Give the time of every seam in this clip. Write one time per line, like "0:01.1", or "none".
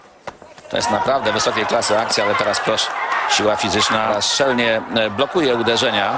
0:04.1